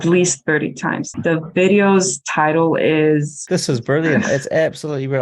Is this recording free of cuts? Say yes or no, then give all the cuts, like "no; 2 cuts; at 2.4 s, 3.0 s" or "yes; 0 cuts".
no; 2 cuts; at 1.1 s, 3.4 s